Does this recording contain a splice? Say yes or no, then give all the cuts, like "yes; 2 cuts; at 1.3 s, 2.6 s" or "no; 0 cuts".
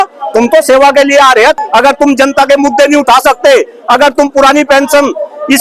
yes; 1 cut; at 1.6 s